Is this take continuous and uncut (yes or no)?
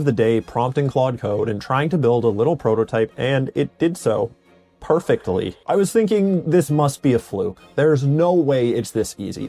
no